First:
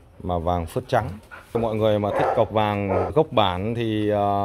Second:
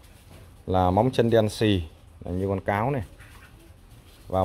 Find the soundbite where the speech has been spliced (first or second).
first